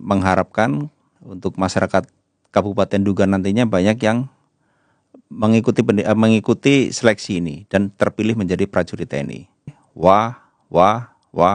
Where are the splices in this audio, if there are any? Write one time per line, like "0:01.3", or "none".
0:09.8